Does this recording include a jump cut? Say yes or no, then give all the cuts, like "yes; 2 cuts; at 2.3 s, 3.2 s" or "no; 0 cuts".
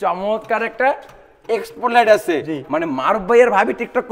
no; 0 cuts